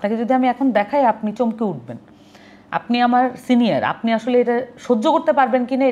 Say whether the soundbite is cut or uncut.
uncut